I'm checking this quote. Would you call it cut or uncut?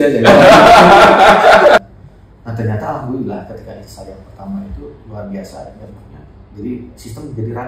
cut